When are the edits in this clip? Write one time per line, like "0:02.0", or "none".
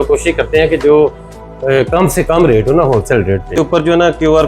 0:03.6